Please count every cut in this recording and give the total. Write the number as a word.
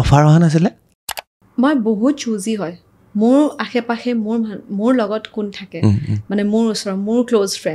one